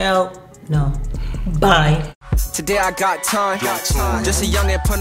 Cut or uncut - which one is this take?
cut